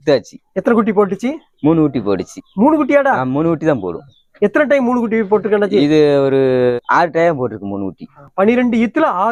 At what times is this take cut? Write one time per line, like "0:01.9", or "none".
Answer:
none